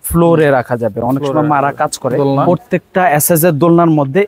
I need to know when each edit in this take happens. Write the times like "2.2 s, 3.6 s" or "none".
2.3 s